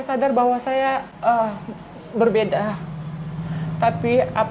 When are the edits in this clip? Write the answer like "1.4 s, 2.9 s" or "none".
1.1 s